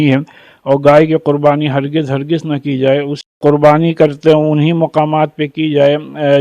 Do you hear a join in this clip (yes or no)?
yes